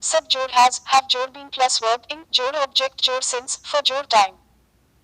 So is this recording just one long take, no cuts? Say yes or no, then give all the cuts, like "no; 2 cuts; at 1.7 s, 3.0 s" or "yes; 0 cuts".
no; 1 cut; at 0.9 s